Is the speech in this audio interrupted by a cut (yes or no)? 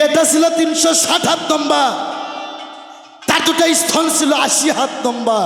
no